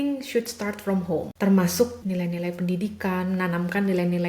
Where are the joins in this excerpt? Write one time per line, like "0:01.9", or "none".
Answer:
0:01.3
0:02.0